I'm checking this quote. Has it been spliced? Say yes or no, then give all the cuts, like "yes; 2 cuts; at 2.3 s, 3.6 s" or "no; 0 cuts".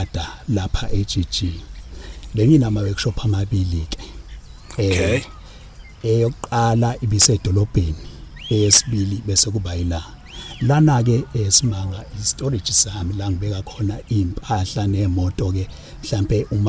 no; 0 cuts